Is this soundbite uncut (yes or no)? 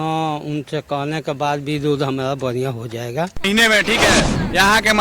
no